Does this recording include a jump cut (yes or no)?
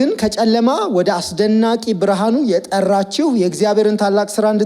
yes